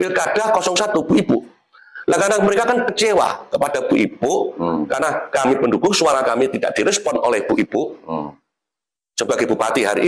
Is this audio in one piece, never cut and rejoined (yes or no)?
yes